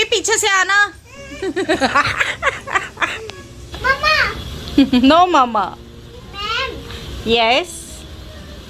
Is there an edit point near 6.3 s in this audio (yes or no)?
no